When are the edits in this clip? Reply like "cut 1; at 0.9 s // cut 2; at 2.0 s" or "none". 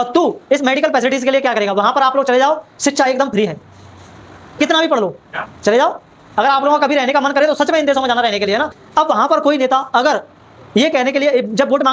cut 1; at 8.8 s